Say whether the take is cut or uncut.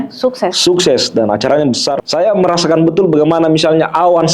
cut